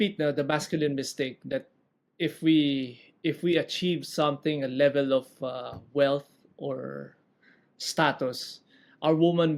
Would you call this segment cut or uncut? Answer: uncut